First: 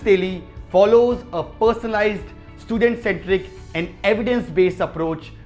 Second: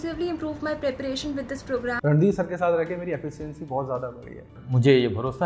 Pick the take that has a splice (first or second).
second